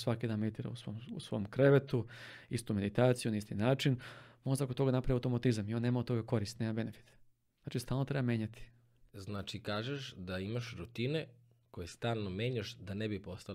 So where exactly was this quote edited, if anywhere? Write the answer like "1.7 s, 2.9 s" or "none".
none